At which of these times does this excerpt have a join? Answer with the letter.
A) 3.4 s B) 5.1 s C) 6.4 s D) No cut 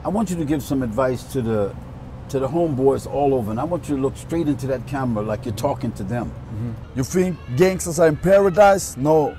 D